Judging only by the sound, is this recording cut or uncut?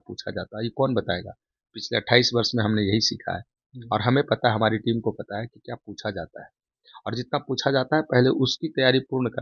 uncut